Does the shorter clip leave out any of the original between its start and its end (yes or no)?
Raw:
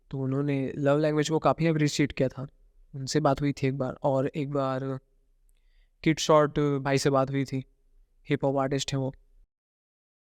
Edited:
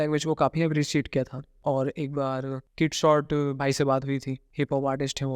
yes